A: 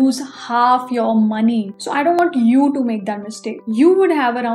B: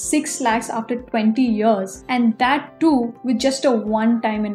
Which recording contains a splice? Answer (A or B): A